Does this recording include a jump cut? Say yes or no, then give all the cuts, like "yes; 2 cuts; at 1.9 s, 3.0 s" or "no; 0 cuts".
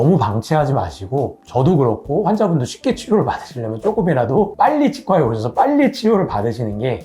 no; 0 cuts